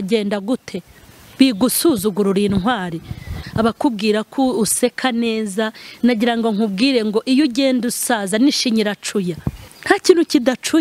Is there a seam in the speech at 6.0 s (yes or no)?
no